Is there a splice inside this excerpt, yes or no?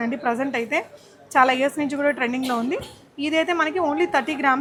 no